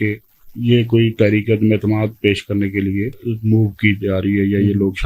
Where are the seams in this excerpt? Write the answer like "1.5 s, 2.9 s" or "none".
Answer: 3.2 s